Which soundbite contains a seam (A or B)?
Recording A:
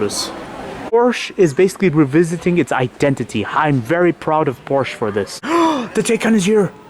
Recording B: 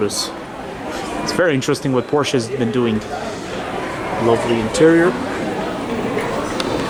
A